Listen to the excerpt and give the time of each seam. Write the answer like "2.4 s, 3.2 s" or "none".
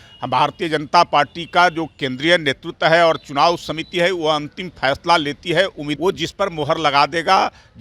5.9 s